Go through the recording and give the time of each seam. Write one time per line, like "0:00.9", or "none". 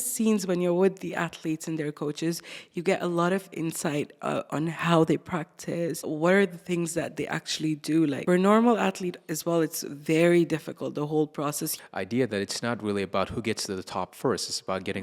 0:06.0
0:08.2
0:11.7